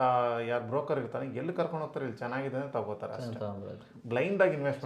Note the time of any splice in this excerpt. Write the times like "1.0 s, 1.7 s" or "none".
none